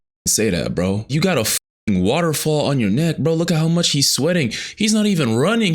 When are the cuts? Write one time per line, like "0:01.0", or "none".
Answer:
0:01.0